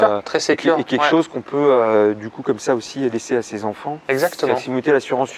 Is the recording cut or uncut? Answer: uncut